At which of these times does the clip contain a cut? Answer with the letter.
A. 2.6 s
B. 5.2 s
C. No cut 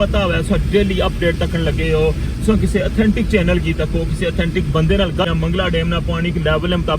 B